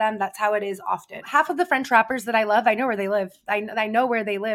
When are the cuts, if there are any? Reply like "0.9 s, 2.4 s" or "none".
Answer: 1.1 s